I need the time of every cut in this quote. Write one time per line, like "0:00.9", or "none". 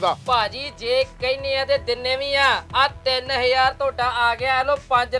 none